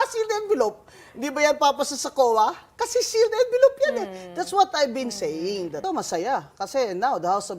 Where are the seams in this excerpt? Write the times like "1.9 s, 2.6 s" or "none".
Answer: 5.8 s